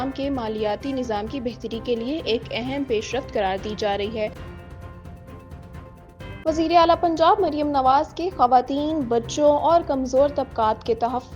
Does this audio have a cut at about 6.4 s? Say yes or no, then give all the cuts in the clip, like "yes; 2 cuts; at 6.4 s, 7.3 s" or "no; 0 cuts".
yes; 2 cuts; at 4.3 s, 6.4 s